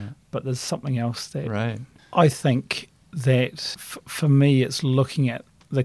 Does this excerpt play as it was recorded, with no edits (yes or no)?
no